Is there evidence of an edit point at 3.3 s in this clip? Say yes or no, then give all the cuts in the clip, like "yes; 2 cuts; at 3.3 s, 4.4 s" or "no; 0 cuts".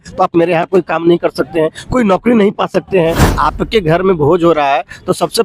yes; 1 cut; at 3.3 s